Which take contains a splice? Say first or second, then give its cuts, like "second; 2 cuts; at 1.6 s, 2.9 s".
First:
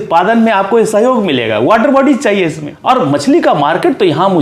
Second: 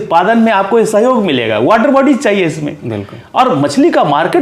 first; 1 cut; at 2.7 s